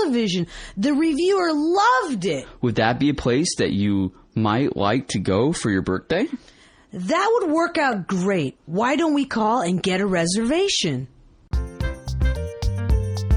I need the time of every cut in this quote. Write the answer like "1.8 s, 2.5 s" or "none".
11.1 s